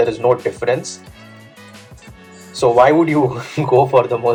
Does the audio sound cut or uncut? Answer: uncut